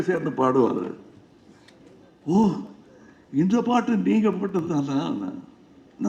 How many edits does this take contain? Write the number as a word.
zero